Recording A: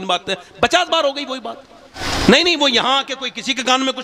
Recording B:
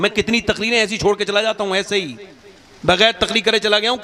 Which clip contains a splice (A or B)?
A